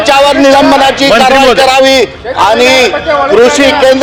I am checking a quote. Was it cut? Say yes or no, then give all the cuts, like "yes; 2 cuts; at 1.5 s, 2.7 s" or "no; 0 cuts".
no; 0 cuts